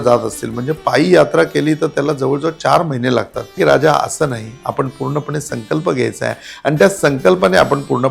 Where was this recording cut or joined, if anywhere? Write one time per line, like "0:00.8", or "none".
0:03.6